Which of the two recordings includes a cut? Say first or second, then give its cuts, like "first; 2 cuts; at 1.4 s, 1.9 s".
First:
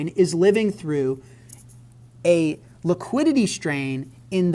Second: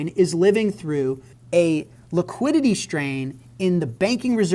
second; 1 cut; at 1.3 s